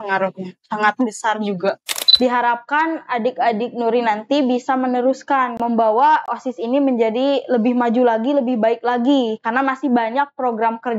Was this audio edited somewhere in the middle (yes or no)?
yes